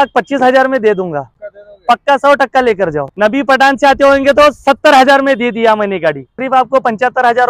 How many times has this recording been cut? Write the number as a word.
two